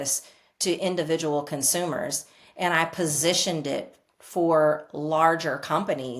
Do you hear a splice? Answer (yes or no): no